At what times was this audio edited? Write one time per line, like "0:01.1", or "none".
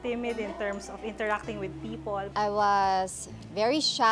0:02.3